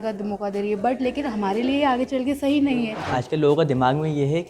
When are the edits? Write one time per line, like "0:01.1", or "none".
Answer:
0:03.0

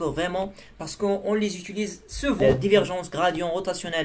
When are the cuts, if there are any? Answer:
0:02.4

